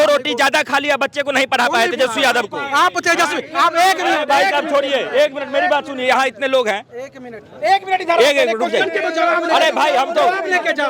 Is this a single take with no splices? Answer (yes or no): yes